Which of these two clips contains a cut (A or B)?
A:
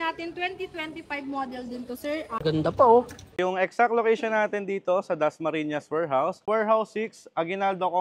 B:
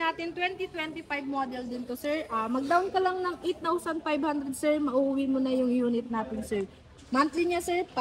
A